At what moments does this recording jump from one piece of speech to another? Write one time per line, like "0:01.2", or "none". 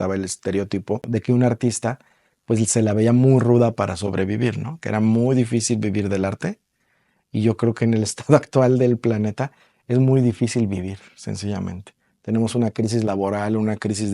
0:01.0